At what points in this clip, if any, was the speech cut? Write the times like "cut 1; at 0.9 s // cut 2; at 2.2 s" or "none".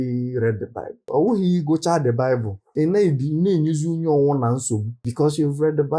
cut 1; at 1.1 s // cut 2; at 2.7 s // cut 3; at 5.1 s

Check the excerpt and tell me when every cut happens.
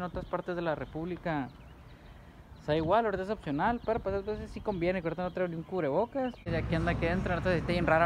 cut 1; at 6.5 s

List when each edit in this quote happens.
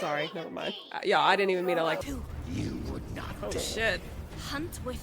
cut 1; at 2.0 s

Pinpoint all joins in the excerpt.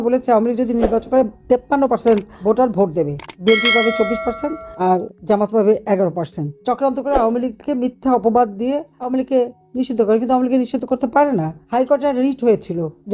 none

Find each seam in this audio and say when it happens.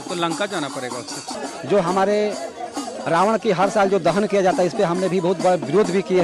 cut 1; at 1.3 s

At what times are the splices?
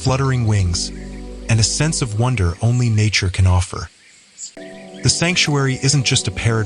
cut 1; at 4.6 s

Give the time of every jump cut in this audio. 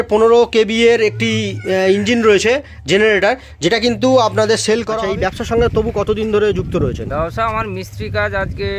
cut 1; at 4.9 s

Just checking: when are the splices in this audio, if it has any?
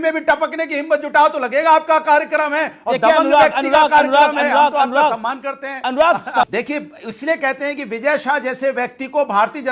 cut 1; at 6.5 s

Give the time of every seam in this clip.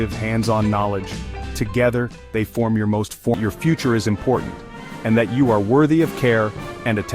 cut 1; at 3.3 s

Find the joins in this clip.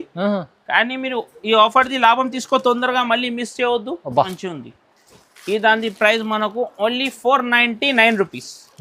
cut 1; at 4.3 s

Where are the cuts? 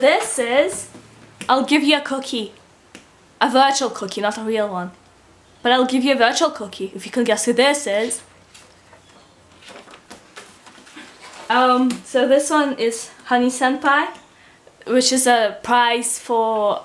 none

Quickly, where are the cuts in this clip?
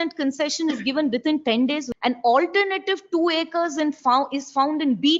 cut 1; at 1.9 s

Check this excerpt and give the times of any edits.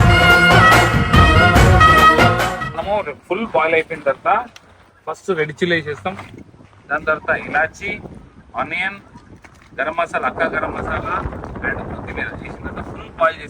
cut 1; at 2.8 s

